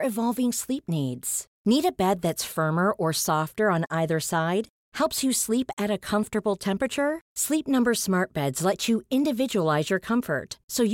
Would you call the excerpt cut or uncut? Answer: uncut